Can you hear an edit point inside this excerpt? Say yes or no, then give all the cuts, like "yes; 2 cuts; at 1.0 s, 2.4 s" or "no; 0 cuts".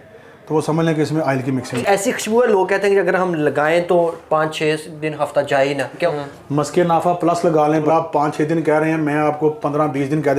yes; 3 cuts; at 1.7 s, 6.1 s, 7.9 s